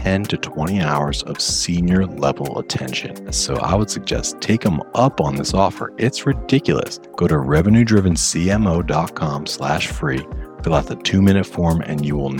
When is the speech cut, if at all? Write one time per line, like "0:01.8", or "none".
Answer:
0:03.4
0:07.0